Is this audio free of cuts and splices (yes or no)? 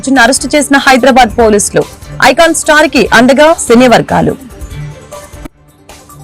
yes